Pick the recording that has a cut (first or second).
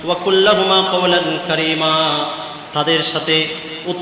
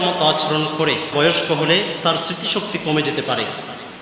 second